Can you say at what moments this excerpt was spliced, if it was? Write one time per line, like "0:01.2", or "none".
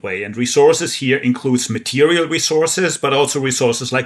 none